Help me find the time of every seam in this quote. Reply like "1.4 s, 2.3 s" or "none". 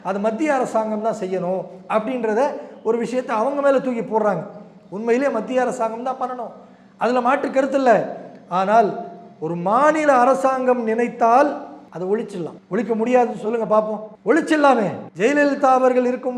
11.8 s, 12.6 s, 14.1 s, 15.0 s